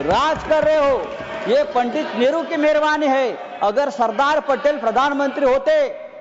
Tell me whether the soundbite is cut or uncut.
uncut